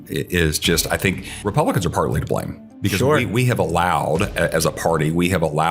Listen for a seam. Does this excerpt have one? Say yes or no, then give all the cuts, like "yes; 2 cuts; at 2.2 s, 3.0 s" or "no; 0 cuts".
yes; 1 cut; at 1.3 s